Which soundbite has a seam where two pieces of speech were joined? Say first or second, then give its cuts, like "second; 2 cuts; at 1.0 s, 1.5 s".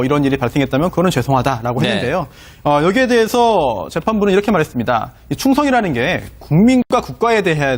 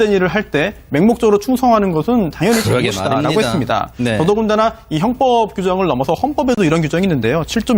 second; 1 cut; at 1.9 s